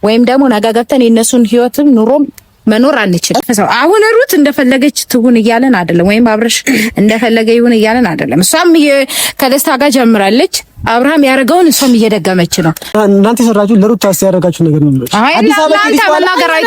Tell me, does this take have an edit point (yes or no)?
yes